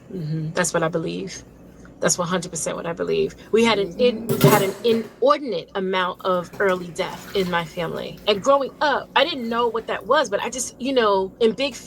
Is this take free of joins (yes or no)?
yes